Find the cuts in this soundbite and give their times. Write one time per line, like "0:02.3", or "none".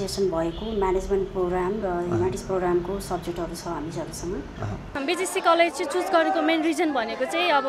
0:05.0